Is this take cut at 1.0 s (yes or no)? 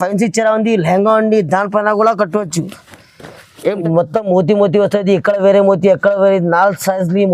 no